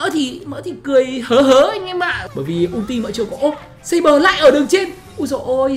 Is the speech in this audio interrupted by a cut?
yes; 1 cut; at 2.2 s

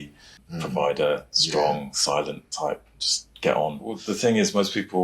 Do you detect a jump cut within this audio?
yes; 1 cut; at 3.9 s

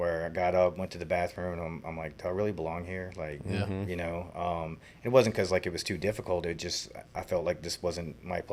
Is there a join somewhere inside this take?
no; 0 cuts

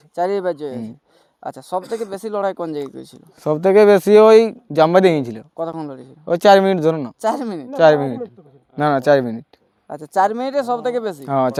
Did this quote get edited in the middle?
no; 0 cuts

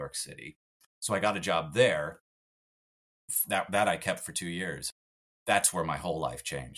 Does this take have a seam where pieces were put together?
no; 0 cuts

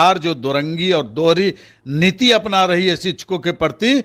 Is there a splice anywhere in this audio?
no; 0 cuts

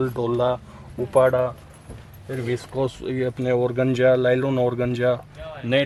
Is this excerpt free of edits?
yes; 0 cuts

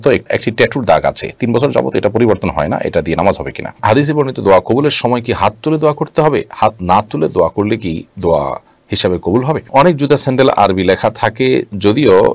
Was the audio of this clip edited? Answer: yes; 2 cuts; at 3.8 s, 9.6 s

